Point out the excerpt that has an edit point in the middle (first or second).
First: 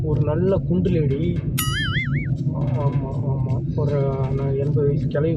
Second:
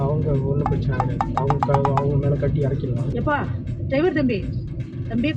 second